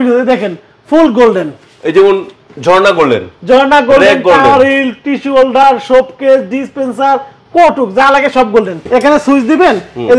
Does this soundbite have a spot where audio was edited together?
yes; 1 cut; at 8.8 s

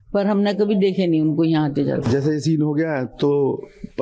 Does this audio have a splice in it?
yes; 1 cut; at 2.1 s

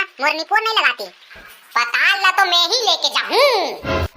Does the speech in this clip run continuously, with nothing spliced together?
no; 1 cut; at 1.4 s

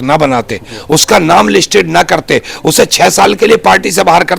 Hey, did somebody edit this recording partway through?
no; 0 cuts

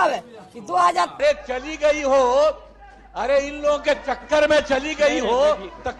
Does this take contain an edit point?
yes; 1 cut; at 1.1 s

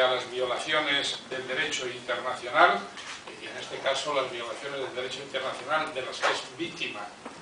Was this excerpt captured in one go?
no; 1 cut; at 3.0 s

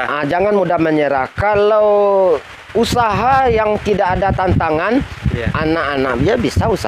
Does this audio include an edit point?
no; 0 cuts

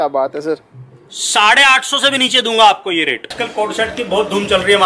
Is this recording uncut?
no; 1 cut; at 3.3 s

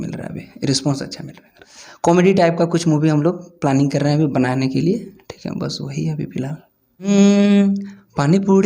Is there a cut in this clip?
yes; 2 cuts; at 1.6 s, 7.1 s

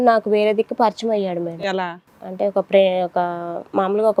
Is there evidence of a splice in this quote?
no; 0 cuts

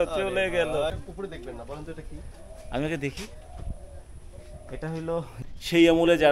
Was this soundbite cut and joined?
yes; 2 cuts; at 1.0 s, 5.4 s

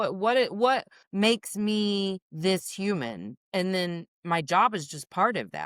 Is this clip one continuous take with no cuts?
no; 4 cuts; at 1.0 s, 2.3 s, 3.3 s, 4.1 s

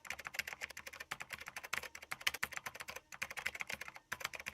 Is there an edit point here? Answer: yes; 1 cut; at 1.2 s

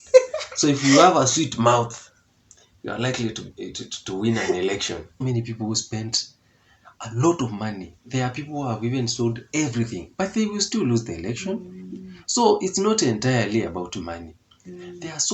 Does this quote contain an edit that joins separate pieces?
yes; 1 cut; at 5.1 s

